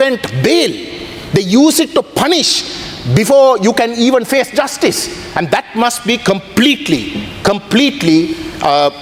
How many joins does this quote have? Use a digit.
0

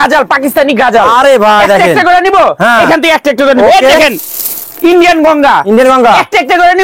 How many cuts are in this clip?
0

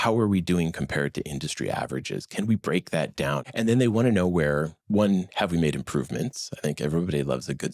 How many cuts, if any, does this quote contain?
1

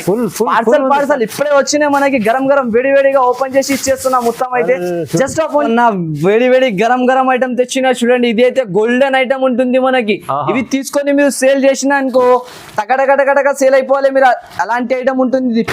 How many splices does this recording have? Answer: 1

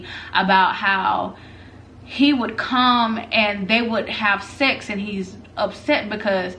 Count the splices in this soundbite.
0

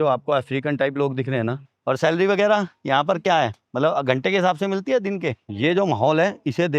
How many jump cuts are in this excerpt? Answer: 3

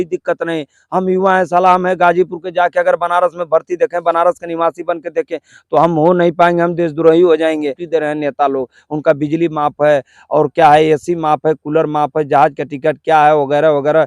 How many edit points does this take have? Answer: 1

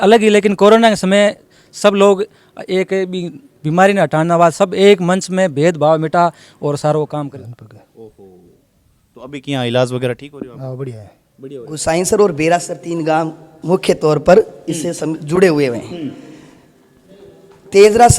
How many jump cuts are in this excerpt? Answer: 2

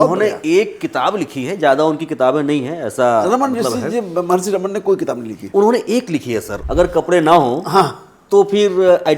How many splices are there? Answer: 1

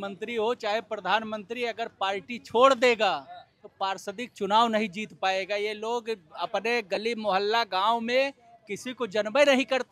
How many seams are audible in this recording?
0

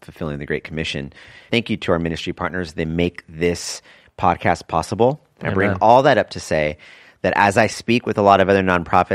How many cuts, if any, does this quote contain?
1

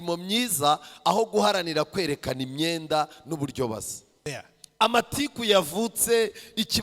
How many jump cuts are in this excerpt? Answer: 1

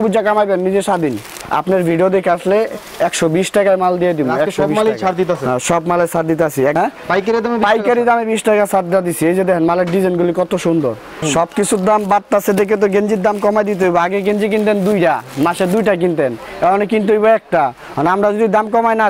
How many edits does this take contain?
3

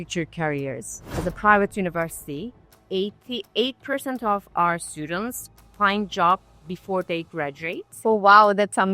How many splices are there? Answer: 1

